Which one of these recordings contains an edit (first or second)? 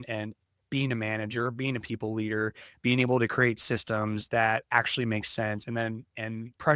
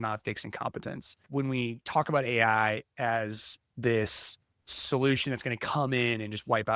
second